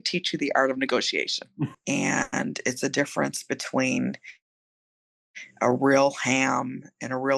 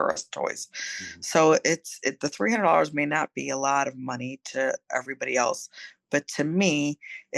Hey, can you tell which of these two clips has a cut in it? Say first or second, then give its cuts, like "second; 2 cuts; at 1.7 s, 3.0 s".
first; 1 cut; at 1.8 s